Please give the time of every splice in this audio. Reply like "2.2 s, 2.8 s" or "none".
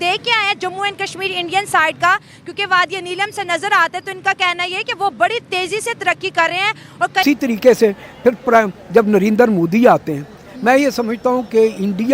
7.2 s